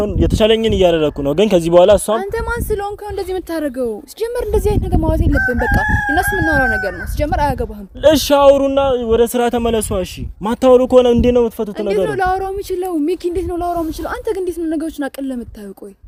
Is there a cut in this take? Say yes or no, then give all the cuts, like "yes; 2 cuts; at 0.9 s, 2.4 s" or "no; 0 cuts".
no; 0 cuts